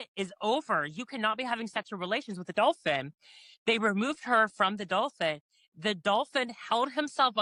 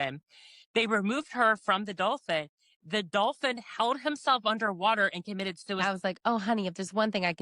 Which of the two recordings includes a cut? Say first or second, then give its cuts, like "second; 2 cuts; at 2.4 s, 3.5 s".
second; 1 cut; at 5.8 s